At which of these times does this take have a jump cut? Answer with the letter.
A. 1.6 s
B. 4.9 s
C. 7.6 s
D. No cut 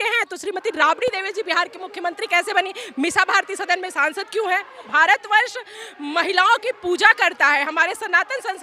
B